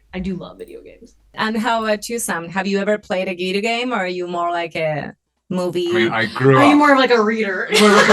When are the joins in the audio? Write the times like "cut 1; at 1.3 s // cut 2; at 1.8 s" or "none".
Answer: cut 1; at 1.3 s